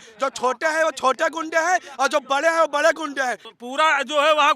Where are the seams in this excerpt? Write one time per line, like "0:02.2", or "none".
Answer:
0:03.4

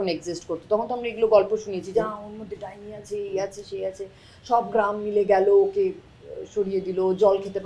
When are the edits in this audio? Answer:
none

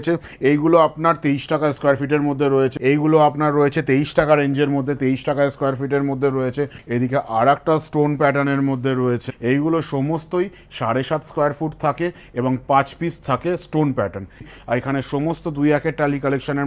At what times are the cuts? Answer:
0:02.7
0:06.8
0:09.3
0:14.5

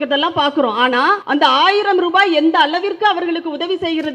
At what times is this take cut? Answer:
0:01.2

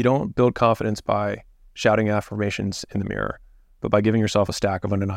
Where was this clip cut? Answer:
none

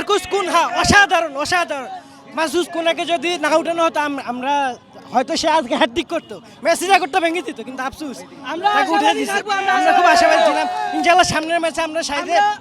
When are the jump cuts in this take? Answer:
none

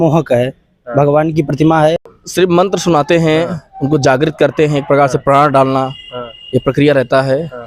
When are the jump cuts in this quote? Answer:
0:02.0

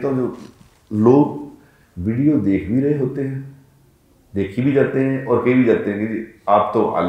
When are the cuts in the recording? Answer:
none

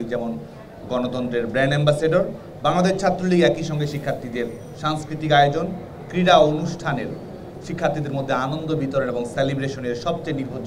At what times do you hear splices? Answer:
none

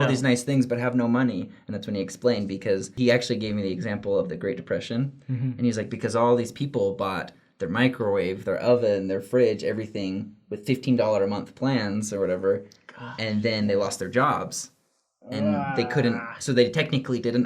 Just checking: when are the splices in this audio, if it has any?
0:02.9

